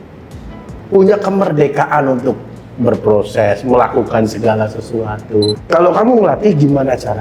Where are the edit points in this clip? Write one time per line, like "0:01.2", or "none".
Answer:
0:05.6